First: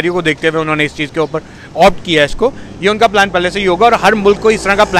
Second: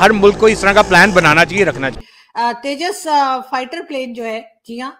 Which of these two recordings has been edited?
second; 1 cut; at 2.0 s

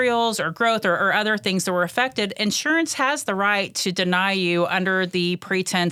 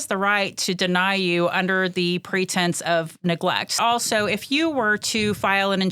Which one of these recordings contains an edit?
second; 1 cut; at 3.8 s

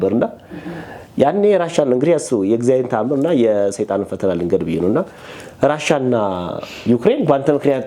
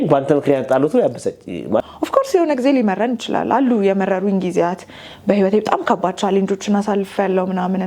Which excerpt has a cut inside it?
second; 1 cut; at 1.8 s

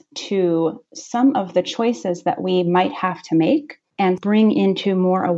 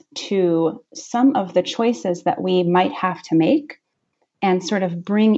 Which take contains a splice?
first; 1 cut; at 4.1 s

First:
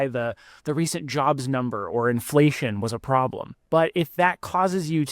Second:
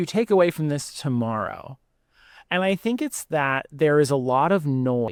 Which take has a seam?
first; 1 cut; at 3.5 s

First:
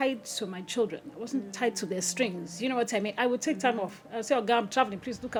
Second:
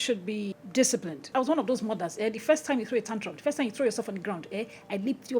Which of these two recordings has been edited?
second; 1 cut; at 1.3 s

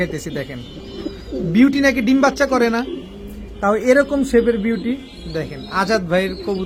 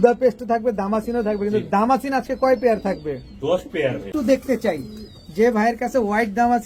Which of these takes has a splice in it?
second; 1 cut; at 4.1 s

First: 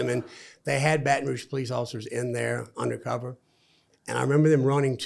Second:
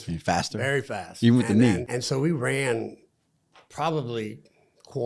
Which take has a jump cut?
second; 1 cut; at 1.9 s

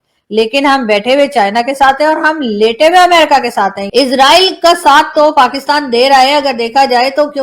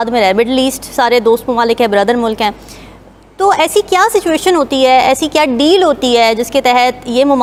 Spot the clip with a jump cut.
first; 1 cut; at 3.9 s

